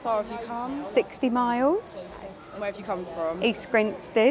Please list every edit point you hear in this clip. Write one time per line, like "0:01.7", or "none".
none